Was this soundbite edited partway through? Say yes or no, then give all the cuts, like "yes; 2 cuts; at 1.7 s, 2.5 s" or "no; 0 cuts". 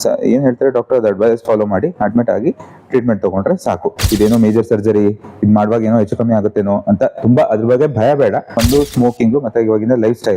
yes; 2 cuts; at 3.9 s, 8.6 s